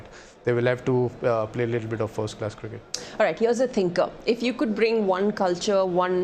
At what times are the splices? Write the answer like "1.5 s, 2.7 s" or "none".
none